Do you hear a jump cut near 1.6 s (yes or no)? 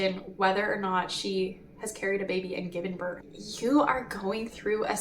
no